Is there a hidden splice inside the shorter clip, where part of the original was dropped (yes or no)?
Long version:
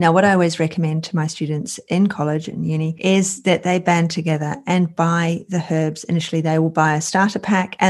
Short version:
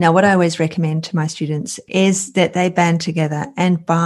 yes